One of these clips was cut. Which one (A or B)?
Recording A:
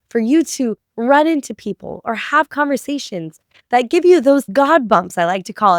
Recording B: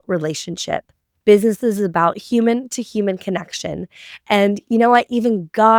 A